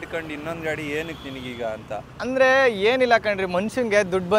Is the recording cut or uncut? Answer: uncut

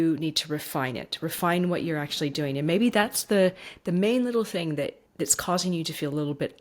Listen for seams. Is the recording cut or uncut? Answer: cut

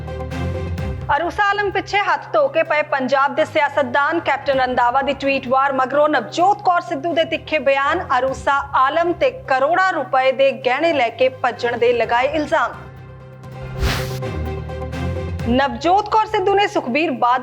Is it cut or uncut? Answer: cut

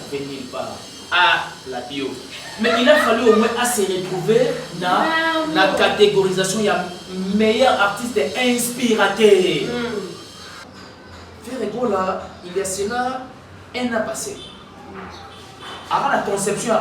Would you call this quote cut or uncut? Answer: cut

